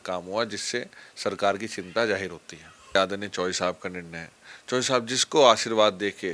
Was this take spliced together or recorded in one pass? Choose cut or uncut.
cut